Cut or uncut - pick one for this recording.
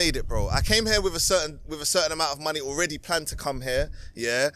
uncut